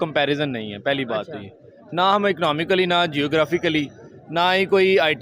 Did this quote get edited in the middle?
no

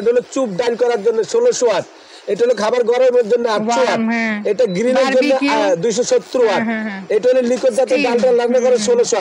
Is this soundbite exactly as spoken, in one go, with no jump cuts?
yes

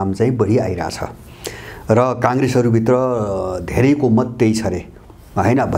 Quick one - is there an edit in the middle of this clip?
no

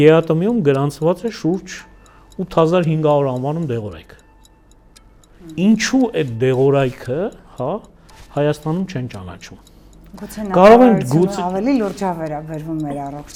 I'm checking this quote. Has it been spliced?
no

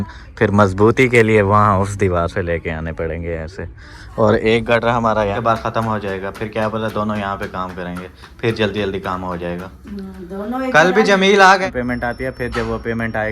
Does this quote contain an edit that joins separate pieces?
yes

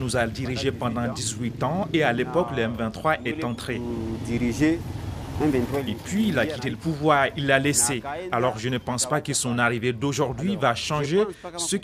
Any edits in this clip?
no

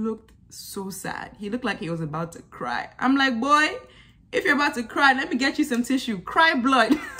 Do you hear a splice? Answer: no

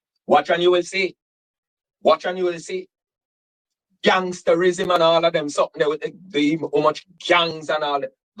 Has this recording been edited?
no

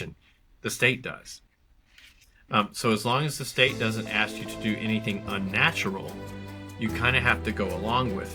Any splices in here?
no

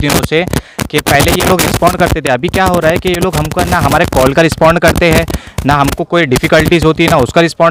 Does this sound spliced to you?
no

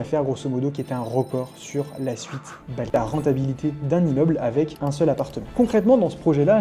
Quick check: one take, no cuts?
no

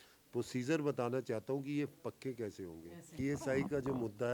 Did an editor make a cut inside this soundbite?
yes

